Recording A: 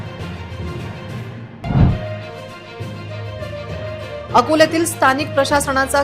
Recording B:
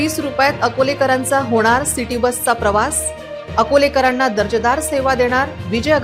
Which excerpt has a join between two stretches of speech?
A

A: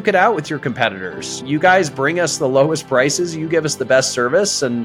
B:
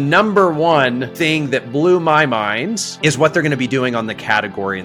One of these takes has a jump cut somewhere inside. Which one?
B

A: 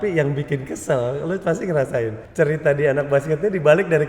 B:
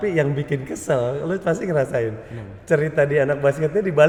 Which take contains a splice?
A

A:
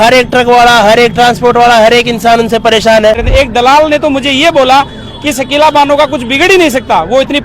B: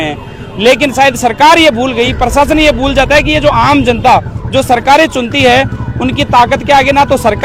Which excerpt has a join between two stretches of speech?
A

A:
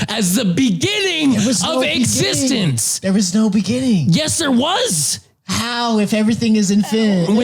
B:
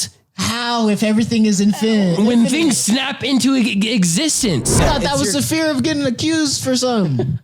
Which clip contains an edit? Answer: B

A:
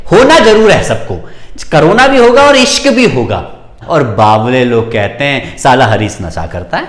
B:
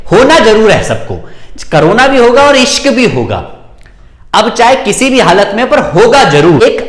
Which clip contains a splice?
A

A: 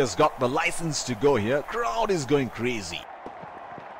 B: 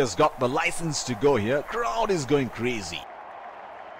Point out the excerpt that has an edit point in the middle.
A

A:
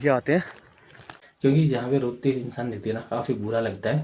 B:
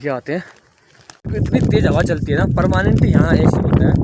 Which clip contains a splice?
A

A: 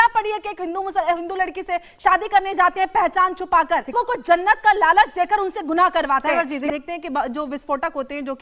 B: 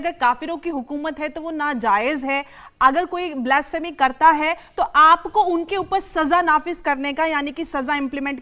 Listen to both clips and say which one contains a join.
A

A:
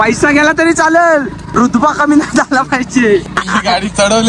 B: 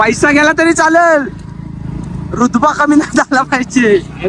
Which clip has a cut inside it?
A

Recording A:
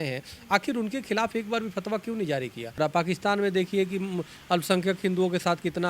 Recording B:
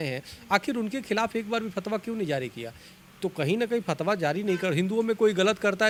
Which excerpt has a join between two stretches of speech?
A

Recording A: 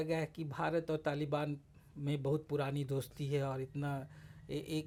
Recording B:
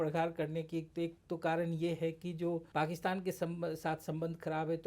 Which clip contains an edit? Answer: B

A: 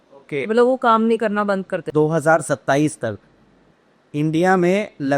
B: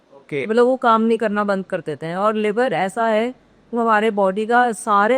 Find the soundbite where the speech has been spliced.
A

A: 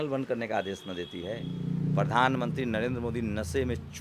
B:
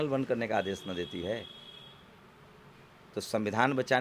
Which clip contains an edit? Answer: A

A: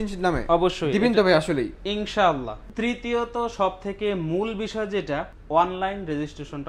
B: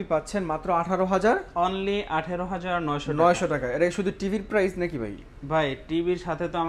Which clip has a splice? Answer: A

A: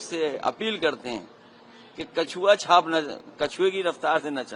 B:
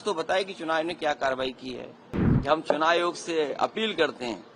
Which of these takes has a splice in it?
B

